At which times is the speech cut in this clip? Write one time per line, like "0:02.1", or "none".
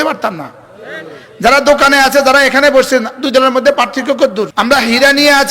0:04.5